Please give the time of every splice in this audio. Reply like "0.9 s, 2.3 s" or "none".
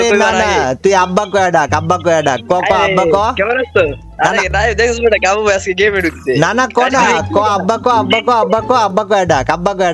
none